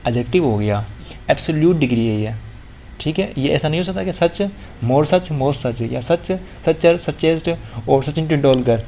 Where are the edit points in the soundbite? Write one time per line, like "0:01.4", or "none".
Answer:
0:01.1